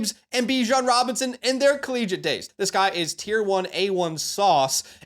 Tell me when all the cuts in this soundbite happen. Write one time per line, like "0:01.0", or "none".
0:02.4